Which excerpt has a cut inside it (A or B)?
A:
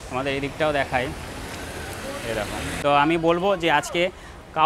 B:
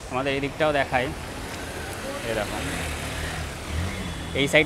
A